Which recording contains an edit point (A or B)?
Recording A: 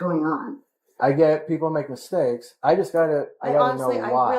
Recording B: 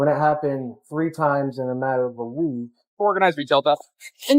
B